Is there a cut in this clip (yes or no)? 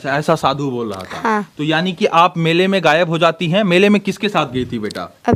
no